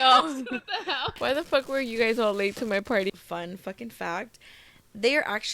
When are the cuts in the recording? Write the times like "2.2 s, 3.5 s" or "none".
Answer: 1.1 s, 3.1 s